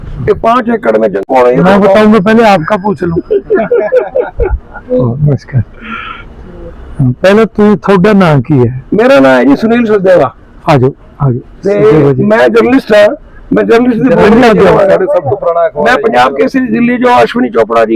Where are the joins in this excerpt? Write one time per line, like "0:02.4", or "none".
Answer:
0:01.2